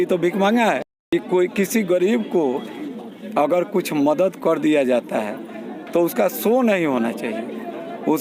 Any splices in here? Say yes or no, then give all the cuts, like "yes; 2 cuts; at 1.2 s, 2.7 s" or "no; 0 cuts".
yes; 1 cut; at 0.9 s